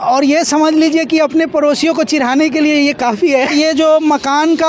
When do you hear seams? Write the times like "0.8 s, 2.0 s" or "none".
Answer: none